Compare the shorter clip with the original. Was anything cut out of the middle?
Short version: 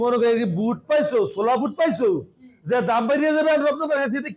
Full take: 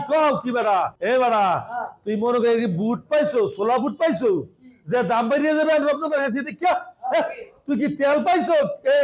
no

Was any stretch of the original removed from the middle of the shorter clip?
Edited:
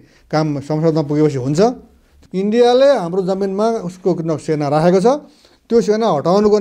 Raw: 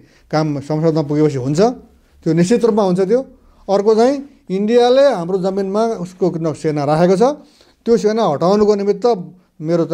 yes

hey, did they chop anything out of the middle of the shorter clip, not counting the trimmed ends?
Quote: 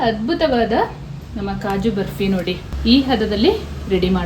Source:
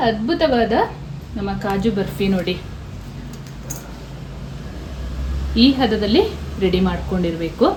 yes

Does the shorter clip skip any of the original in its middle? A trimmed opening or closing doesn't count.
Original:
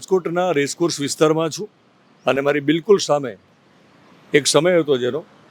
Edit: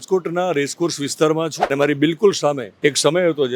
yes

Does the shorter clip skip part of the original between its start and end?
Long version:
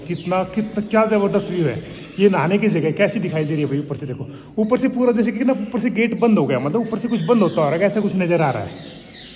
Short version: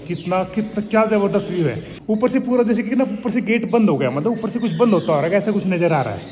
yes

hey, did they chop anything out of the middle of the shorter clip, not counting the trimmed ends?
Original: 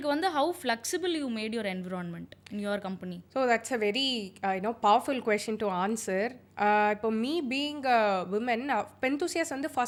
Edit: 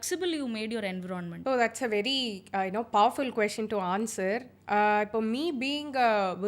yes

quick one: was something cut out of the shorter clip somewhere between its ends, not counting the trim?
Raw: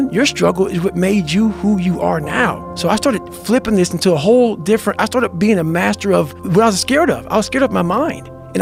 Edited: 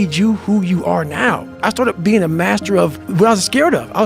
yes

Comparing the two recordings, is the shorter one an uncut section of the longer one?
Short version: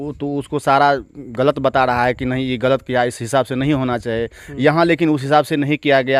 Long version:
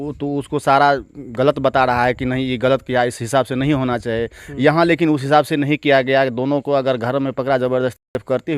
yes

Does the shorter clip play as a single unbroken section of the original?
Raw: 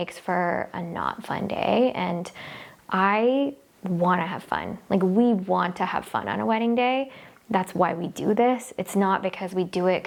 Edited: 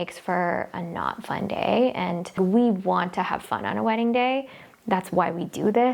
no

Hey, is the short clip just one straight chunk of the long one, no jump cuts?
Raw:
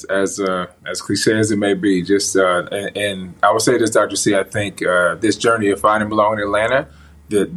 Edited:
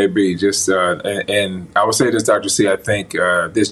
yes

